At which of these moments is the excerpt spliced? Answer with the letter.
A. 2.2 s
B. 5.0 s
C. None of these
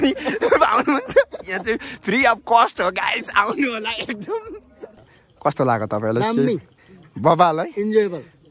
B